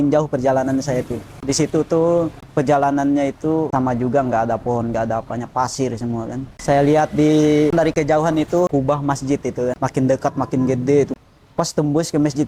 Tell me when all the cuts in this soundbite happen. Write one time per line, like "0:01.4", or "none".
0:01.4
0:02.4
0:03.7
0:06.5
0:07.7
0:08.7
0:09.8
0:11.1

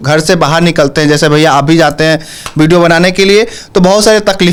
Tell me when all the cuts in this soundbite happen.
none

